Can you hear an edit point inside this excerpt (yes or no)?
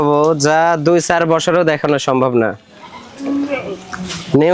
no